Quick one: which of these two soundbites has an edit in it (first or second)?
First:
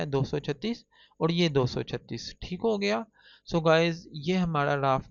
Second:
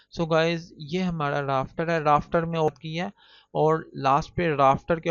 second